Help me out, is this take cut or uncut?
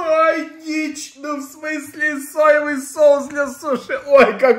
uncut